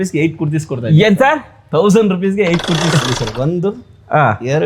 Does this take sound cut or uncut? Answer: cut